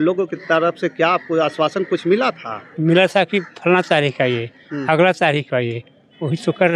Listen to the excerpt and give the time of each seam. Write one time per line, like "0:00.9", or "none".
none